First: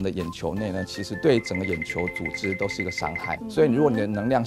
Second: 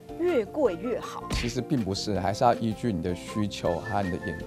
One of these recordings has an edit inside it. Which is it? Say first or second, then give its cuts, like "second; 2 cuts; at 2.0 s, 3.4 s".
first; 2 cuts; at 1.0 s, 3.4 s